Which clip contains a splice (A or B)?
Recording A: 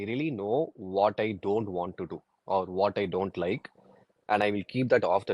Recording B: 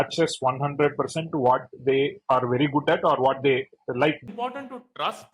B